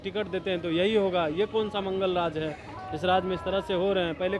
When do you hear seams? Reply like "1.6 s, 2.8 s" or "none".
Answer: none